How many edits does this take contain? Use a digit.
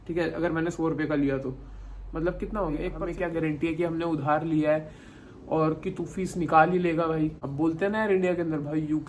2